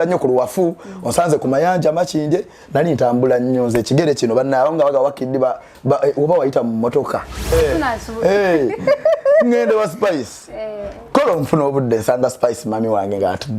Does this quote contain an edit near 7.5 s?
yes; 1 cut; at 7.5 s

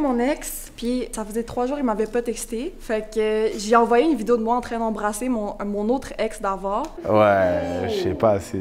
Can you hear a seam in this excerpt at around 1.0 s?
yes; 3 cuts; at 1.0 s, 2.8 s, 6.9 s

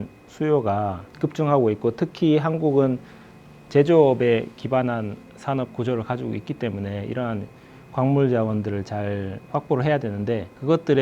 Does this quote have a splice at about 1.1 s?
yes; 1 cut; at 1.1 s

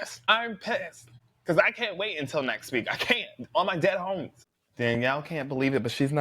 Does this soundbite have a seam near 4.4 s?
yes; 1 cut; at 4.4 s

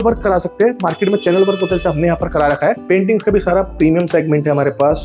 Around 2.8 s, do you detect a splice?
yes; 1 cut; at 2.8 s

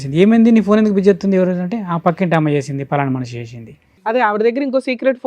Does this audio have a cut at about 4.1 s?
yes; 1 cut; at 4.1 s

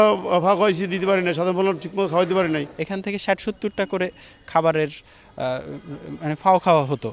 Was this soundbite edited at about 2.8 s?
yes; 1 cut; at 2.8 s

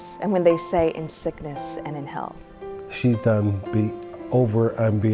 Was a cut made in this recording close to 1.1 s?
no; 1 cut; at 2.8 s

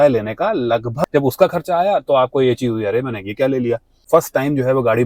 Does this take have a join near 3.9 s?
yes; 2 cuts; at 1.0 s, 3.9 s

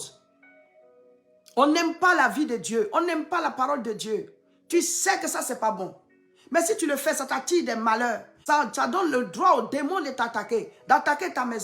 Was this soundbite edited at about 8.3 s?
yes; 1 cut; at 8.3 s

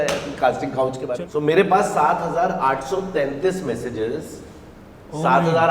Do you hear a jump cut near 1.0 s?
yes; 1 cut; at 1.0 s

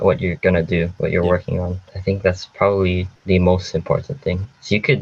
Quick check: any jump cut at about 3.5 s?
no; 1 cut; at 0.9 s

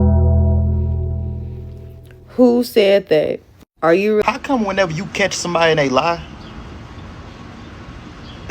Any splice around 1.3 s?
no; 1 cut; at 4.2 s

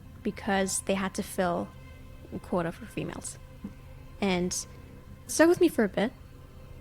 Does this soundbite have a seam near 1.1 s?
no; 1 cut; at 5.3 s

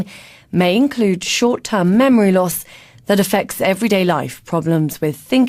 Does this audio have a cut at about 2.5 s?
no; 1 cut; at 4.2 s

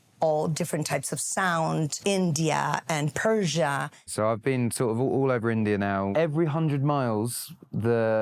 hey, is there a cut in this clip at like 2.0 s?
yes; 3 cuts; at 2.0 s, 4.1 s, 6.1 s

